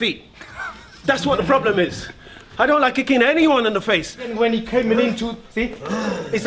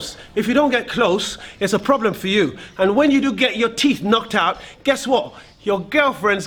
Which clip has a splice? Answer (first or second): first